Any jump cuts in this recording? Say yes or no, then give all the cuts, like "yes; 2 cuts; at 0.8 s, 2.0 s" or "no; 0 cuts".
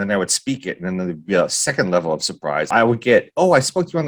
yes; 1 cut; at 2.7 s